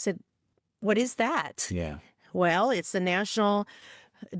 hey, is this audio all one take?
yes; 0 cuts

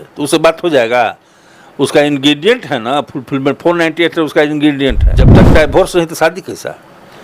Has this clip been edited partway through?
yes; 1 cut; at 5.4 s

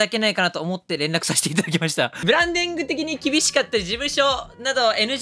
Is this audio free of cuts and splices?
no; 1 cut; at 2.2 s

